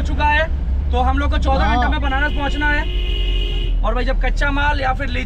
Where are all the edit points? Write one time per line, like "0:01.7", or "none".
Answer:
none